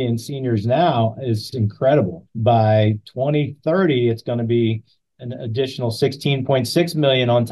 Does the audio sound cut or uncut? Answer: cut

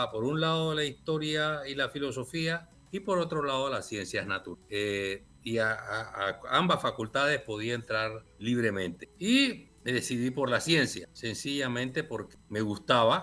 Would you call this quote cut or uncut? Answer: cut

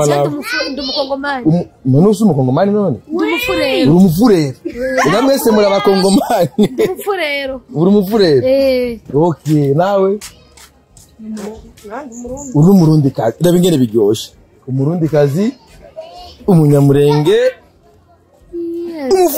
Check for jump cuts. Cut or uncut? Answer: uncut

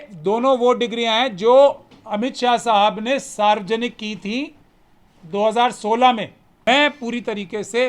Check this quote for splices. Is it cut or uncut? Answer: cut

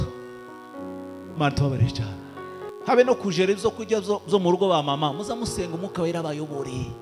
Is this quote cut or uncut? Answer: cut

